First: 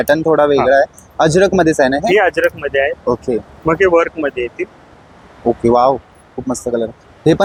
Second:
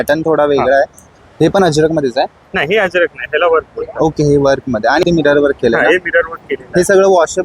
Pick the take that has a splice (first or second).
second